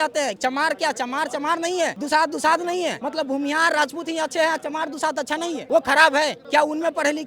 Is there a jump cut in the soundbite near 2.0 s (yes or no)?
yes